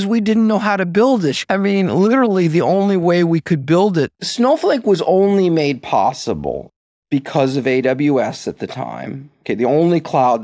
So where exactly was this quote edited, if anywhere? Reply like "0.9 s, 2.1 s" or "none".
1.5 s, 4.2 s